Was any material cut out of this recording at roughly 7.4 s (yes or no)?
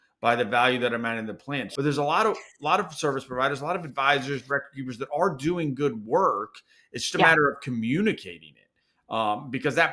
no